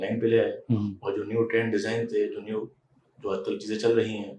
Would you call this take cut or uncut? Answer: uncut